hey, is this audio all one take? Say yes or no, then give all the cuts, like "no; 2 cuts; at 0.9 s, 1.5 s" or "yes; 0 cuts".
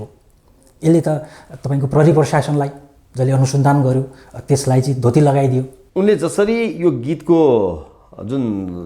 no; 1 cut; at 5.8 s